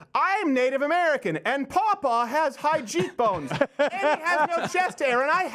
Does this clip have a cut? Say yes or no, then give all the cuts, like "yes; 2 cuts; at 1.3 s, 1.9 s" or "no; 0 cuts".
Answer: no; 0 cuts